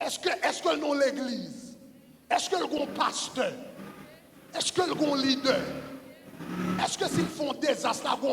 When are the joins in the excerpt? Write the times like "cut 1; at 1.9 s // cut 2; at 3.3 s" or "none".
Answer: none